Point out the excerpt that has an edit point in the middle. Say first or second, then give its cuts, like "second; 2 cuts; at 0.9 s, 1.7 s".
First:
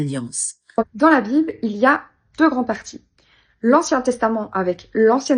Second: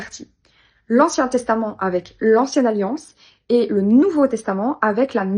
first; 1 cut; at 0.9 s